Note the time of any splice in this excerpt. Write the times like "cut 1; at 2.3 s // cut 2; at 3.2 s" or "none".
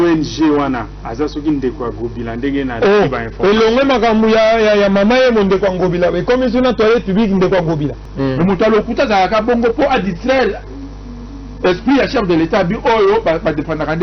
cut 1; at 8.1 s